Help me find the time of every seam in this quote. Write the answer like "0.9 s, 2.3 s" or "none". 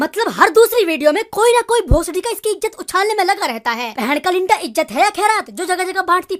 3.9 s